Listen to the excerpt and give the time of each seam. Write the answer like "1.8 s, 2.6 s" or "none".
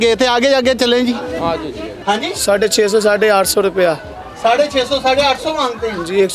1.9 s